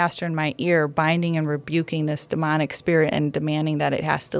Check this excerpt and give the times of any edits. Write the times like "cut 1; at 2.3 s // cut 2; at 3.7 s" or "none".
none